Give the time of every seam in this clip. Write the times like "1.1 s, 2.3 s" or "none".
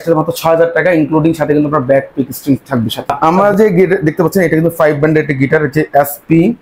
3.1 s

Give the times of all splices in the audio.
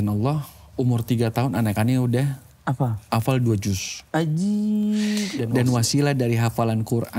5.4 s

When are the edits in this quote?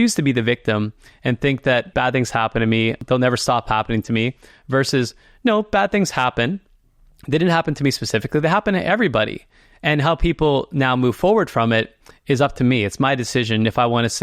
1.9 s, 3.0 s

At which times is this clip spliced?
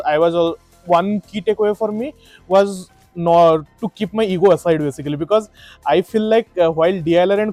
none

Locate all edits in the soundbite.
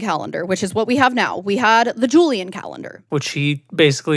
3.0 s

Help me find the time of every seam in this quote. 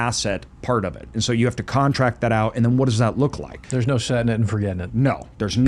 3.6 s

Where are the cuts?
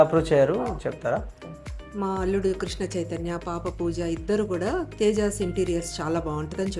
1.7 s

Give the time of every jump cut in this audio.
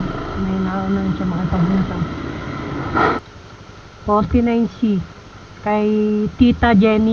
3.2 s

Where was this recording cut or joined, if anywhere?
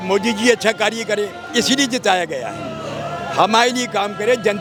none

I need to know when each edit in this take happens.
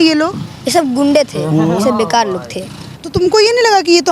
2.8 s

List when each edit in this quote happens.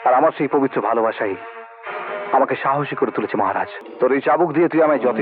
3.8 s

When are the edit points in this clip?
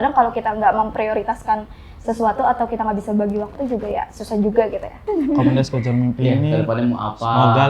5.0 s

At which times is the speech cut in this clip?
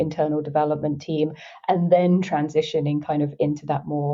none

